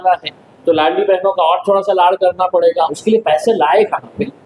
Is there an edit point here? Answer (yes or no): no